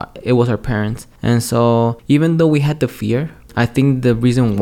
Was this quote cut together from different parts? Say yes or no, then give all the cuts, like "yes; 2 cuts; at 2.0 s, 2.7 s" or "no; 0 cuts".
yes; 3 cuts; at 1.0 s, 2.0 s, 3.4 s